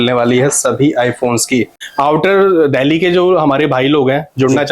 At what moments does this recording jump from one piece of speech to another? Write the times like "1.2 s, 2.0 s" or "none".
1.8 s